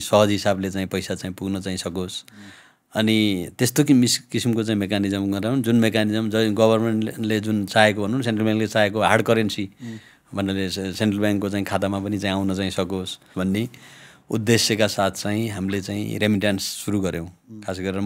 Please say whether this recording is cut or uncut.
cut